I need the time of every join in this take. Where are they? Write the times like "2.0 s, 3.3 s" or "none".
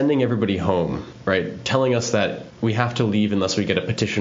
1.1 s, 2.5 s